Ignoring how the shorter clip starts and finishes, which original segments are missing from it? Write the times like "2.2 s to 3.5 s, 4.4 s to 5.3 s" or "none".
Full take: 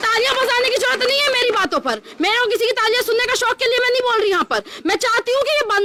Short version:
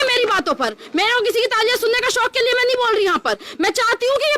none